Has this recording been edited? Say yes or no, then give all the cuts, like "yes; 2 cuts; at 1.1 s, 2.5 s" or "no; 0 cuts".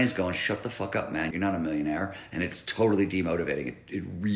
yes; 1 cut; at 1.3 s